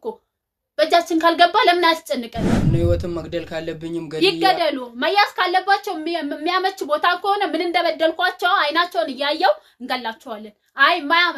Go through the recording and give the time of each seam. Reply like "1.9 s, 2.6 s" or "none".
2.6 s